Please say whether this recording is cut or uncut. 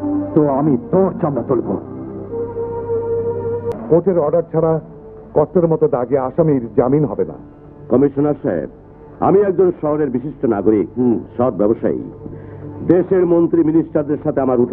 cut